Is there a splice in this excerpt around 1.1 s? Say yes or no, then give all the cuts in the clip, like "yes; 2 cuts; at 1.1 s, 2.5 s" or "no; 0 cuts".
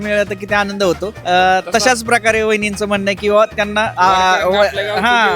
yes; 2 cuts; at 1.1 s, 3.9 s